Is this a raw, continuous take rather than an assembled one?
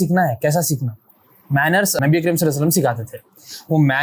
no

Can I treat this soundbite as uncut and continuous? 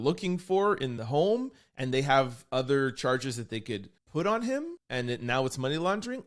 no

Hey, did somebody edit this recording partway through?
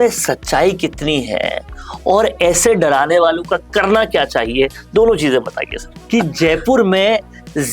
yes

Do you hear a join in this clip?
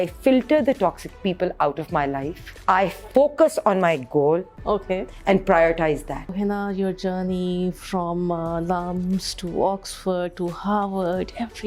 yes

